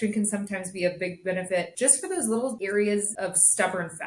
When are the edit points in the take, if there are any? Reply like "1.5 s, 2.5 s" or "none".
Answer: 1.7 s, 2.6 s, 3.1 s

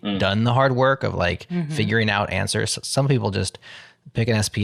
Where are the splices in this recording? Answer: none

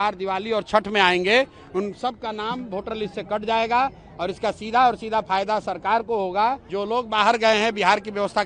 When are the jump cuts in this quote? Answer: 6.7 s

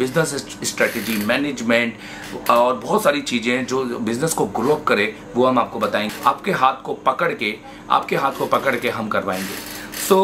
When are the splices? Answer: 6.1 s

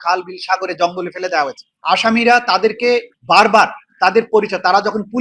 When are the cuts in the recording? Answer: 1.7 s, 3.1 s

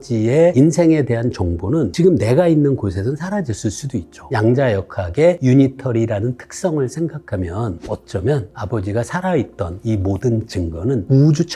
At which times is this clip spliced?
4.2 s, 5.4 s, 7.8 s

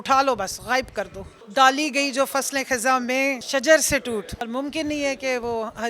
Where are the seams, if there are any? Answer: 1.3 s, 3.4 s, 4.5 s

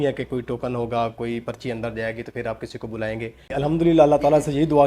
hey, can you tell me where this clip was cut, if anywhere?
3.5 s

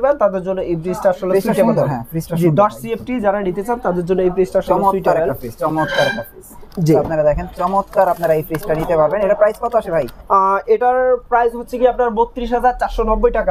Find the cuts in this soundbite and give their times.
none

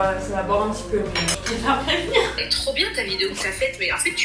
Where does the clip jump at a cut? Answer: 2.5 s

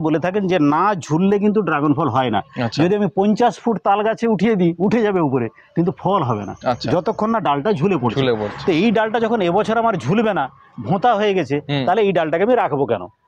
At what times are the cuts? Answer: none

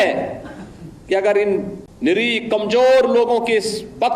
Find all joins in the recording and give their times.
1.8 s

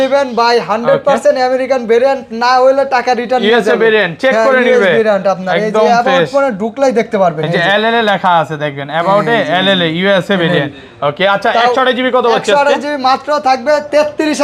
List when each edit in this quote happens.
none

